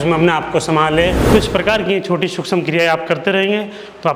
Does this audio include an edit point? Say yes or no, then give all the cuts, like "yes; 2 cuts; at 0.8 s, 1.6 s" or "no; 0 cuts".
yes; 1 cut; at 1.2 s